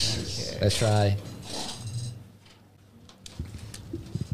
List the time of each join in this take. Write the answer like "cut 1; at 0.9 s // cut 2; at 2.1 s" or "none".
cut 1; at 2.8 s